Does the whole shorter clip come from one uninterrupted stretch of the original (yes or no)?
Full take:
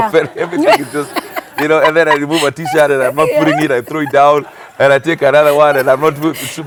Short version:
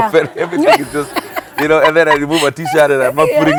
yes